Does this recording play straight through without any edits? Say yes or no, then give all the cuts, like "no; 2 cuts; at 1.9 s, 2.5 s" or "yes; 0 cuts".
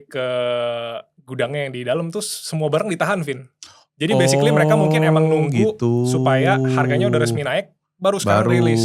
yes; 0 cuts